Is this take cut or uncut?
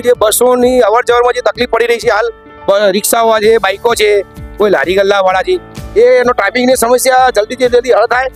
uncut